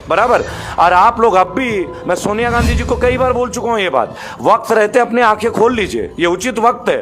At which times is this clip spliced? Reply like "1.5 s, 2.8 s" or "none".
none